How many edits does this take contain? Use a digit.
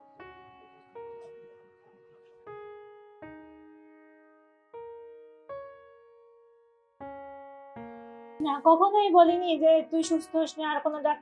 0